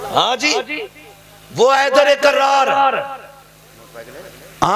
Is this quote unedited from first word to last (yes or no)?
yes